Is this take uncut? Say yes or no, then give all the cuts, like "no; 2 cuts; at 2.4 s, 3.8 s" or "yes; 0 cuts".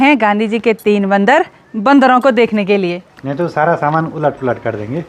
yes; 0 cuts